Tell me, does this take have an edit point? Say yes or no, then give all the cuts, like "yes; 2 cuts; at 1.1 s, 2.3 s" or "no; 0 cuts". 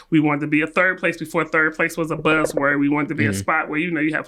no; 0 cuts